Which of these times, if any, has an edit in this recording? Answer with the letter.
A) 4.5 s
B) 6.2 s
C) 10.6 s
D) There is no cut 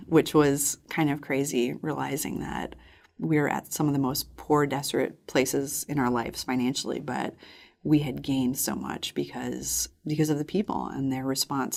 D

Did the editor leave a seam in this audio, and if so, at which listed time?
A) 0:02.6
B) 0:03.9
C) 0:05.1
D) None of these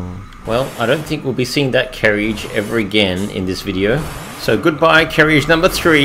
D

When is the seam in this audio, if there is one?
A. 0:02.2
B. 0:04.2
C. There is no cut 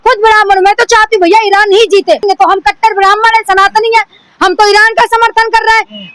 A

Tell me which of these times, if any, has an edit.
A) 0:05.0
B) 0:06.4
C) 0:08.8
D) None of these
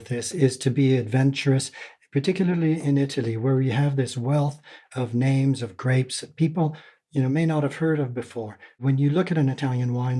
C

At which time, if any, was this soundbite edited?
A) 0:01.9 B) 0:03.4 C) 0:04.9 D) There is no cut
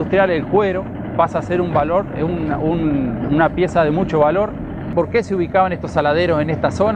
C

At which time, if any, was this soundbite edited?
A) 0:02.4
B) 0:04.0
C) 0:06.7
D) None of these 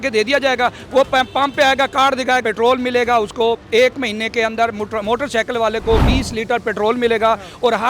A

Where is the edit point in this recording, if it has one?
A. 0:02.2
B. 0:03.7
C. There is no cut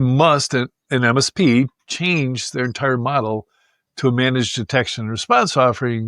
C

